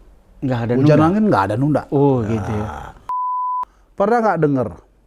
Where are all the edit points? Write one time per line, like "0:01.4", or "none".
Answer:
0:03.3